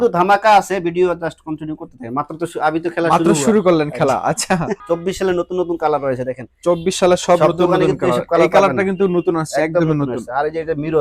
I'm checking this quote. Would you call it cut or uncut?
cut